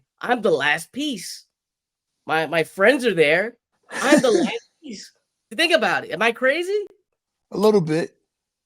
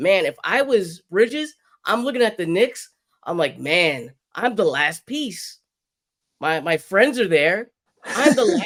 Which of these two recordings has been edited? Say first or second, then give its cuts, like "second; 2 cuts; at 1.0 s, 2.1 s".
first; 1 cut; at 5.5 s